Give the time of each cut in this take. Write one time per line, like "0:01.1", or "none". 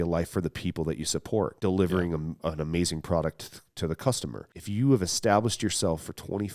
0:01.5
0:02.4
0:04.5